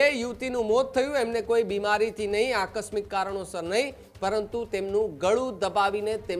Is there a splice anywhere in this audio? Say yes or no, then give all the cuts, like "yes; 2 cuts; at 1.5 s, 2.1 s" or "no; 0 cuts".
no; 0 cuts